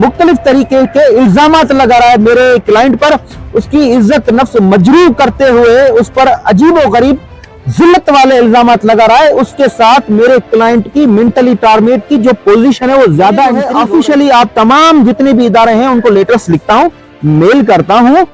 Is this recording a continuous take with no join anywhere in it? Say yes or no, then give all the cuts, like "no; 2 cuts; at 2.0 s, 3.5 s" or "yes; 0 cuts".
no; 1 cut; at 13.7 s